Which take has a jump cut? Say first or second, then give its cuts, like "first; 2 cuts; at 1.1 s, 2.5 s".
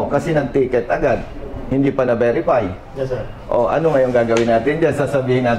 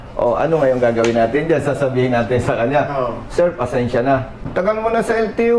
second; 1 cut; at 4.4 s